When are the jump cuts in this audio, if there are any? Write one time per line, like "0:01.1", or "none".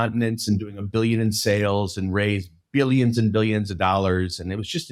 none